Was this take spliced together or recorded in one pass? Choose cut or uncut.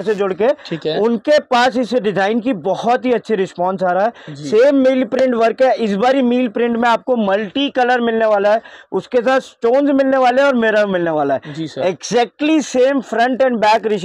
uncut